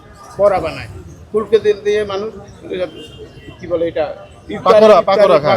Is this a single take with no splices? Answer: yes; 0 cuts

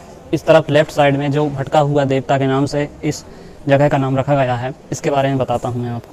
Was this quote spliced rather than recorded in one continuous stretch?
no; 0 cuts

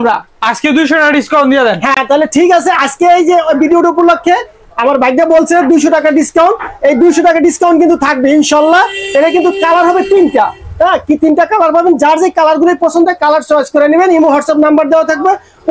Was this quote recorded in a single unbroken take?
yes; 0 cuts

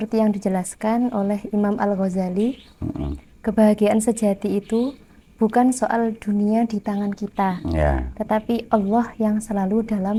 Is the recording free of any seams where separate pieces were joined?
yes; 0 cuts

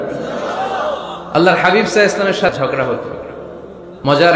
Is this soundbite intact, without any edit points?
no; 1 cut; at 2.5 s

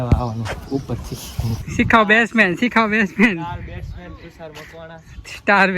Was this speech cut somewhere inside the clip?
yes; 1 cut; at 1.6 s

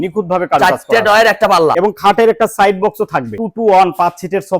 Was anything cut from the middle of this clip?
yes; 2 cuts; at 1.8 s, 3.4 s

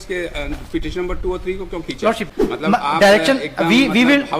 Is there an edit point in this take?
yes; 1 cut; at 2.3 s

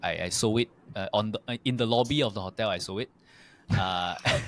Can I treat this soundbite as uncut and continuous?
yes; 0 cuts

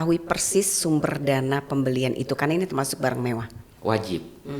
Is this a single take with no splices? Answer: no; 1 cut; at 3.7 s

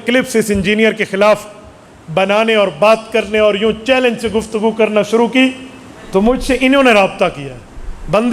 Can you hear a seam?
no; 0 cuts

